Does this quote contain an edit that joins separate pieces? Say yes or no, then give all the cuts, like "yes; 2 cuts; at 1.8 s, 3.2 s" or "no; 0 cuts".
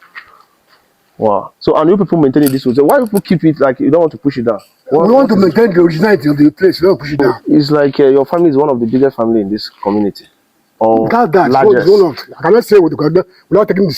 yes; 1 cut; at 7.2 s